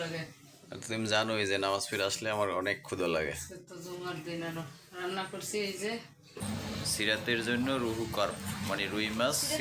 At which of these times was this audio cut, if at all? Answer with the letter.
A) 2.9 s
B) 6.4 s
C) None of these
B